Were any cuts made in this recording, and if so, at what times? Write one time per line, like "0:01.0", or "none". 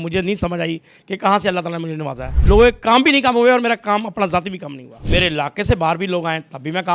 0:02.4
0:04.9